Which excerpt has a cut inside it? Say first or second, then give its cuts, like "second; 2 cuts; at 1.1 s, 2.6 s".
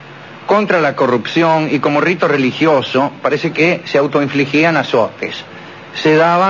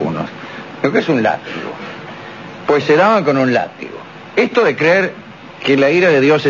first; 1 cut; at 2.5 s